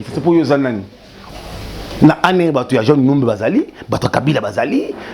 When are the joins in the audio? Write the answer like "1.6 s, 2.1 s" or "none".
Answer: 1.3 s

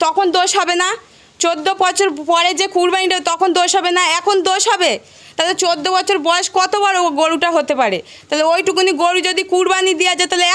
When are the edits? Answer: none

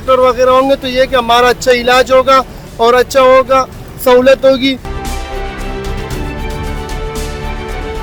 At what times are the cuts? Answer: none

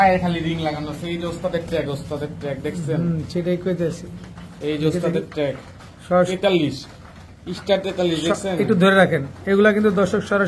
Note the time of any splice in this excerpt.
none

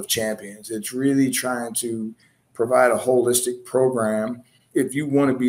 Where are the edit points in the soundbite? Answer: 4.6 s

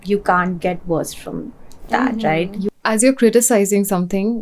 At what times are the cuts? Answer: 2.6 s

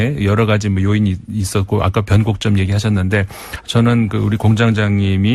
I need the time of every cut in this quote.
2.4 s

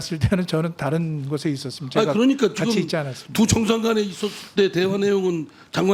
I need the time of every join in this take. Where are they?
none

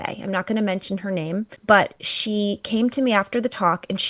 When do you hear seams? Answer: 1.5 s

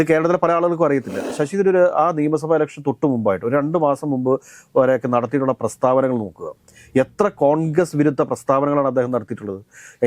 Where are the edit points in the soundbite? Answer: 1.3 s

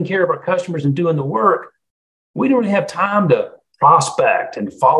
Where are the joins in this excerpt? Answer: none

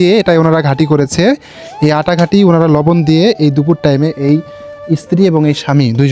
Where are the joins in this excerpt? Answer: none

